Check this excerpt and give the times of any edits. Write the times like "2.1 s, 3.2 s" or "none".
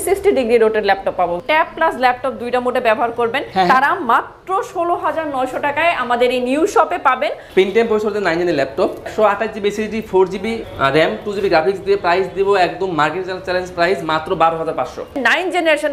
1.4 s, 3.4 s, 7.4 s, 9.0 s, 15.2 s

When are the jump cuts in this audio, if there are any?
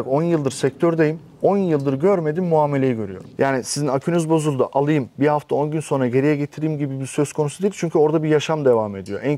3.3 s

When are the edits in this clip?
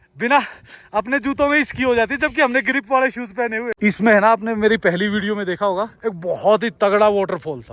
3.7 s

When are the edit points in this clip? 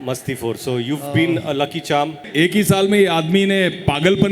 2.2 s

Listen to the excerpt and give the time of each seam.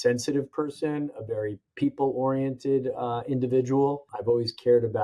1.6 s

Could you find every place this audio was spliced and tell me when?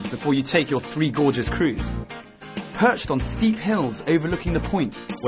3.3 s

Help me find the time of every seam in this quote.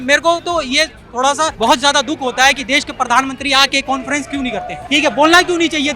1.5 s, 4.8 s

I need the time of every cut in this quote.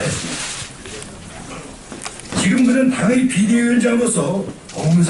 none

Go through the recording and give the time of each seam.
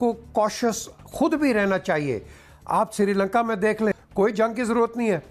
4.0 s

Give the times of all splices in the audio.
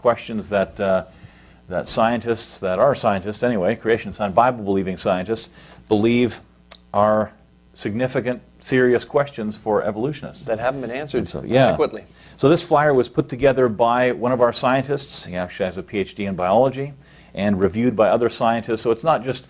10.6 s

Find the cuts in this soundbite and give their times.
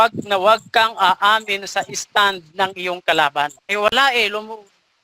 3.6 s

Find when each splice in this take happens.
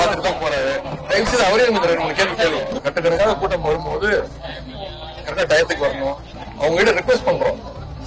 2.8 s, 6.4 s

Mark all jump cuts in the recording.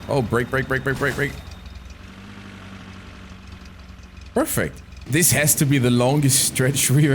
4.9 s

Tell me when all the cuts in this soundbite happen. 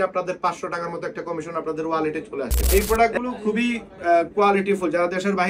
2.6 s

